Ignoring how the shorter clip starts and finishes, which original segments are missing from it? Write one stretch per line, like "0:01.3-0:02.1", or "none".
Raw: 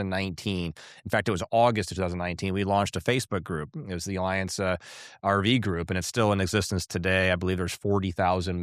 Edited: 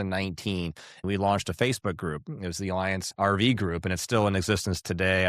0:01.0-0:02.4
0:04.5-0:05.1